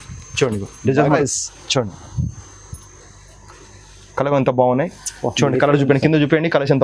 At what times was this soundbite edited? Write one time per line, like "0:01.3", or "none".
0:01.2